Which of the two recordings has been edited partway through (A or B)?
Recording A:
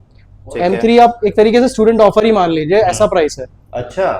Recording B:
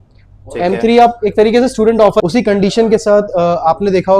B